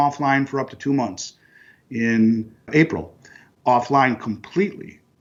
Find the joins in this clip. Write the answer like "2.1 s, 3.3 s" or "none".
none